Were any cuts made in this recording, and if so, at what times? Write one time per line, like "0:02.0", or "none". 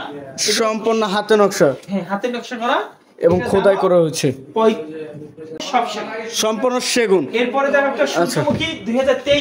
0:05.6